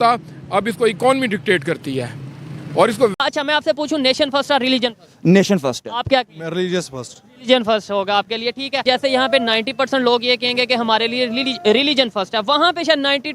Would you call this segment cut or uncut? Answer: cut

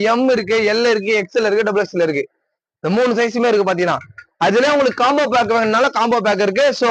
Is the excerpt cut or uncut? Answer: uncut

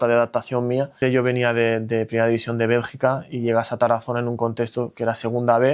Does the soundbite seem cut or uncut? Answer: cut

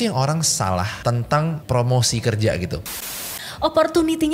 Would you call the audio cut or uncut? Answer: cut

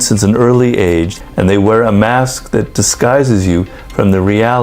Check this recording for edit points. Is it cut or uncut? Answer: cut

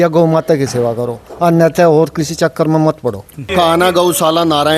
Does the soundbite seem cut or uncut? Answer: cut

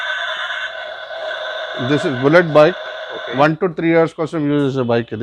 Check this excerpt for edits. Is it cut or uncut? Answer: uncut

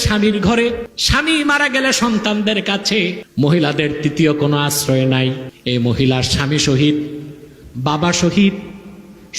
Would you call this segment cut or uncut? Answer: cut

